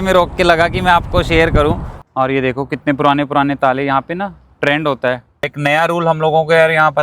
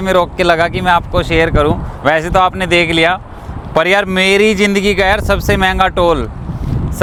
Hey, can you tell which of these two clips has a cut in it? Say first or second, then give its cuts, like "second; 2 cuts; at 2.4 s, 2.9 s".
first; 2 cuts; at 1.9 s, 5.5 s